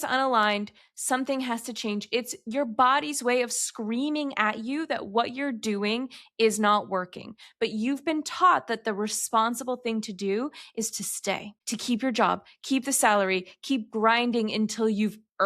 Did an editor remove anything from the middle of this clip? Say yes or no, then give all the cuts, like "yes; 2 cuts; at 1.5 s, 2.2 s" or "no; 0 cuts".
yes; 1 cut; at 11.5 s